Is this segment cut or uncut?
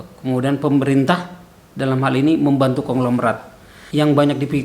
cut